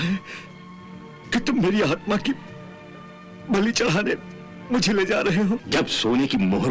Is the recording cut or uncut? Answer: cut